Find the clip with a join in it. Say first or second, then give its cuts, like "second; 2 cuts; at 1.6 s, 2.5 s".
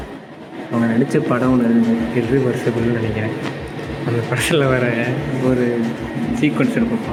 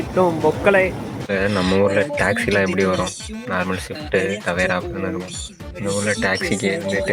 second; 1 cut; at 1.1 s